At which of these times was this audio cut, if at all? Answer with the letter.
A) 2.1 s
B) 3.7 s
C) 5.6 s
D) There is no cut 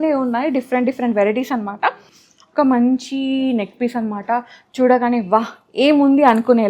A